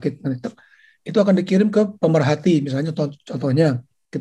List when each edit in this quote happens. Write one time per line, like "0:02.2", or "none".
none